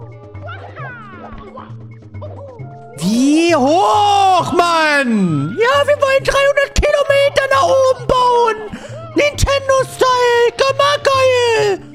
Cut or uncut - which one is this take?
uncut